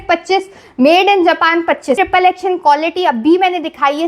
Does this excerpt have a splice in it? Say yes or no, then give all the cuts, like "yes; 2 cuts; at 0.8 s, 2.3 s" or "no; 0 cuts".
yes; 1 cut; at 2.0 s